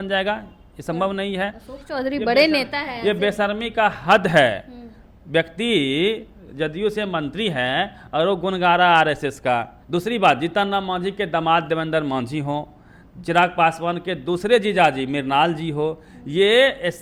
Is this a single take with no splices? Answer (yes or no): yes